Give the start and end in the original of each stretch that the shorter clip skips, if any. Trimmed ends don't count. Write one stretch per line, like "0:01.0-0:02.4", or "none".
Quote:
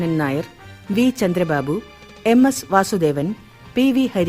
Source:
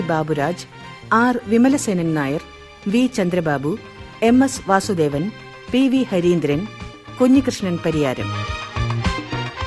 none